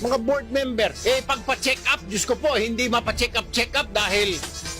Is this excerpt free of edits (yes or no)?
no